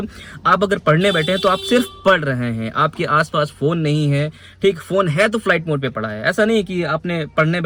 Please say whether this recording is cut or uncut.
uncut